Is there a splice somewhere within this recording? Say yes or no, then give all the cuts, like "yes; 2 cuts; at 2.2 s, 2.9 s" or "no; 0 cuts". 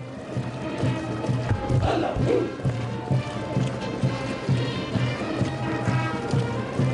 yes; 1 cut; at 5.4 s